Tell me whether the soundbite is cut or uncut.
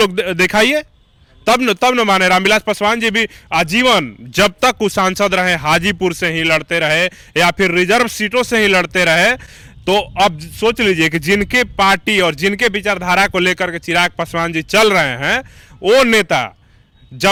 uncut